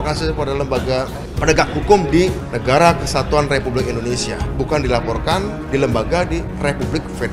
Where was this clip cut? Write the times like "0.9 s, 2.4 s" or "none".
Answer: 1.2 s, 2.5 s, 4.4 s, 5.6 s, 6.5 s